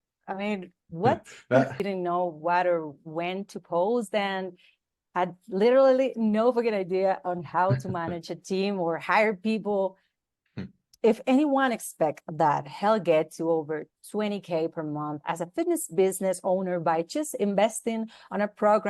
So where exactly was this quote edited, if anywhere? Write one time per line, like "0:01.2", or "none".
0:01.8
0:10.0